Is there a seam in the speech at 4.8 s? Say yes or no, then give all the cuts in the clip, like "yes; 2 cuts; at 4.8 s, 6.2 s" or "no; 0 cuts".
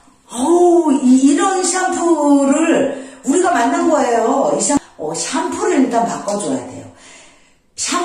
yes; 1 cut; at 4.8 s